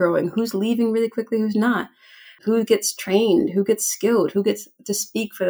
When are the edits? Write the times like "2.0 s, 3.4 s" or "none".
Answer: none